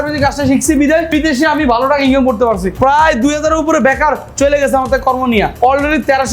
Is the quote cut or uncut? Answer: cut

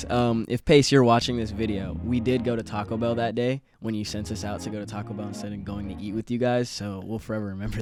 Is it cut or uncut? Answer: uncut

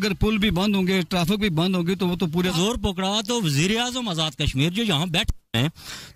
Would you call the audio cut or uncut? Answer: cut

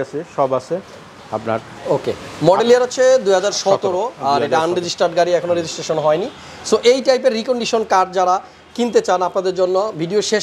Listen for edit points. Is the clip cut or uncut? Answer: uncut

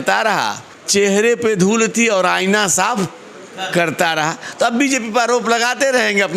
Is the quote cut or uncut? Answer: uncut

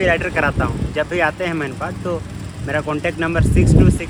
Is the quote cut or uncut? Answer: uncut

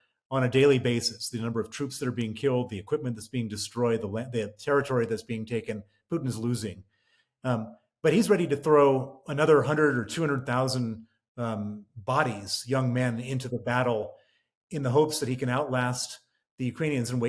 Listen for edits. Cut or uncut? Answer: uncut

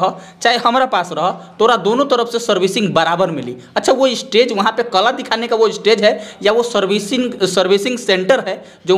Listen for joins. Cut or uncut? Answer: uncut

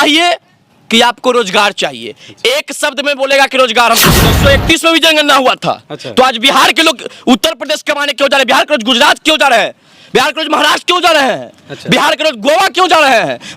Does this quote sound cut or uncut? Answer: cut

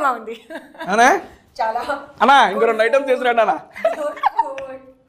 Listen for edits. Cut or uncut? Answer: uncut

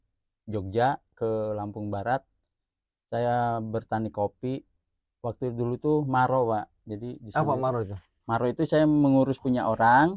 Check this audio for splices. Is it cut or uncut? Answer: uncut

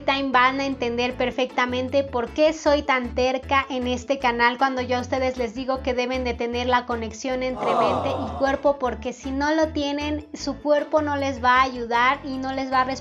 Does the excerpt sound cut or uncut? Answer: uncut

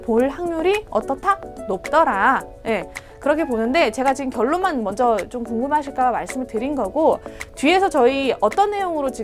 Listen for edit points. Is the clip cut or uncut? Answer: uncut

